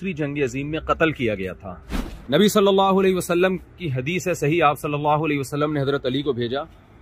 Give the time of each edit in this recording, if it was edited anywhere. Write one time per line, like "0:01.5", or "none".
0:02.1